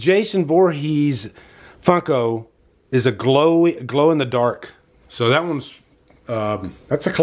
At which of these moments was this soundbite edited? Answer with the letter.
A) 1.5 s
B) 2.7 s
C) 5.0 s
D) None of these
D